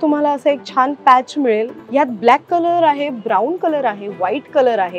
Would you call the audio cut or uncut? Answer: cut